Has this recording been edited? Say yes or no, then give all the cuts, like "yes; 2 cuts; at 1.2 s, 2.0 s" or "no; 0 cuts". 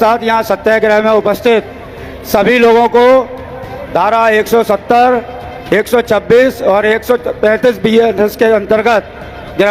no; 0 cuts